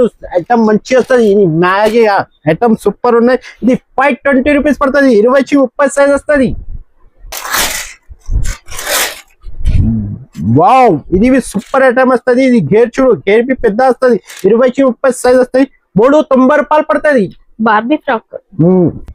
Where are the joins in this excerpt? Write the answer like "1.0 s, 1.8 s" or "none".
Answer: none